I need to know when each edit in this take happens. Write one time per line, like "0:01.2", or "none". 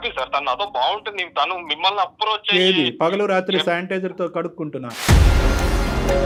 none